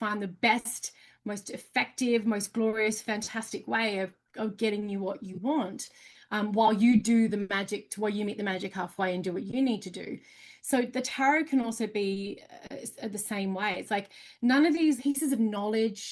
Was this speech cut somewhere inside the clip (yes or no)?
yes